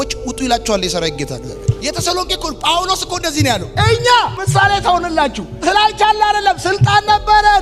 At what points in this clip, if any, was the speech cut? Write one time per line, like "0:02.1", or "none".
none